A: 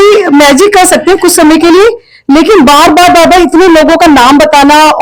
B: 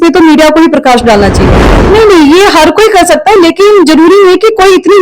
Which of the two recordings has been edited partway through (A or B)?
B